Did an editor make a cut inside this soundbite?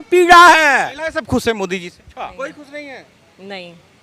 yes; 2 cuts; at 0.9 s, 2.2 s

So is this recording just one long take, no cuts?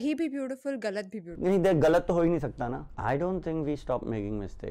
no; 1 cut; at 2.9 s

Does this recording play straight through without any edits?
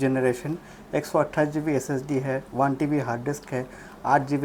yes; 0 cuts

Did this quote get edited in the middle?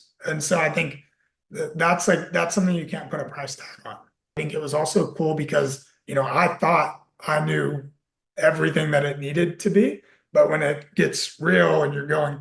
yes; 1 cut; at 4.4 s

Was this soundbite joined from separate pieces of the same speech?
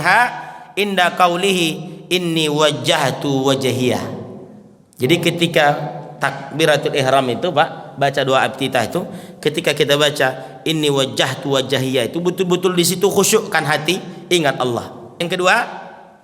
yes; 1 cut; at 15.2 s

